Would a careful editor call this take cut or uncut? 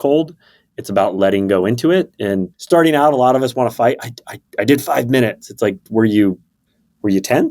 cut